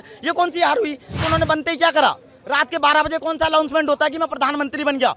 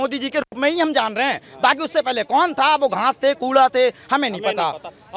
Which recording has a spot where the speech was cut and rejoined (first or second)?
first